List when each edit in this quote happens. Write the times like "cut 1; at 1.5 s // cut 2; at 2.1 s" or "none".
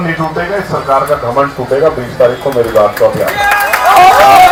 none